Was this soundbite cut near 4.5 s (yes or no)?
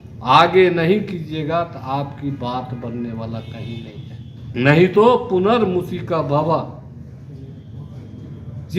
yes